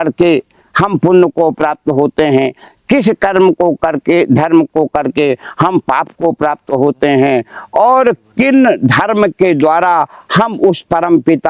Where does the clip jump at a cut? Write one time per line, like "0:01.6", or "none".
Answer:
none